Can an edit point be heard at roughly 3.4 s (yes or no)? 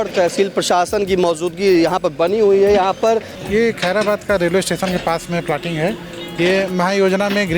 yes